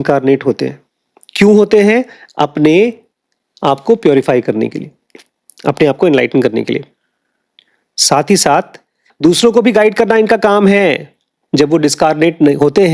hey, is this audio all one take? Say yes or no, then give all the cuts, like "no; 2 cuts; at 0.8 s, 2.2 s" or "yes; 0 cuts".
yes; 0 cuts